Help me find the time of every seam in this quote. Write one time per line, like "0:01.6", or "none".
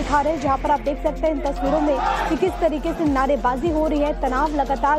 0:02.7